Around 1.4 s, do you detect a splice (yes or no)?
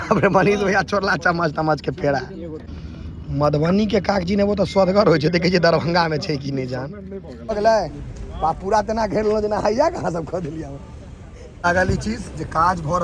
no